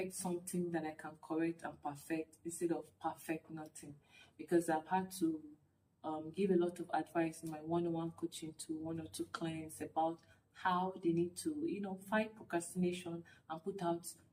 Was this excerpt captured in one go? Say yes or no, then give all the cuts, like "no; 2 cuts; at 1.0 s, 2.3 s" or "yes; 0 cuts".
yes; 0 cuts